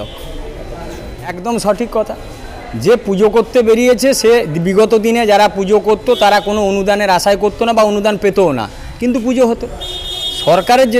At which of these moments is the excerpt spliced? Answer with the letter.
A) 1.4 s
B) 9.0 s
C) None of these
A